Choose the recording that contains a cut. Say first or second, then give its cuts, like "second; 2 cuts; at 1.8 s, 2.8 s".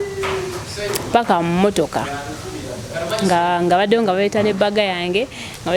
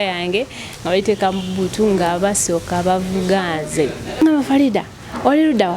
second; 1 cut; at 4.2 s